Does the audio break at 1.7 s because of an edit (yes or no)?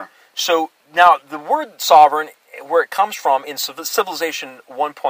no